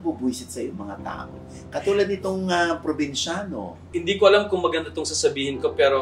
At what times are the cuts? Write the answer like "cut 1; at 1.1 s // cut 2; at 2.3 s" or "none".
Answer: cut 1; at 3.9 s